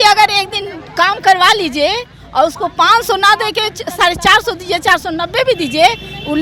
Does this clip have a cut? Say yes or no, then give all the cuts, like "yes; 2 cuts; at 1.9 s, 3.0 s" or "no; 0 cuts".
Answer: no; 0 cuts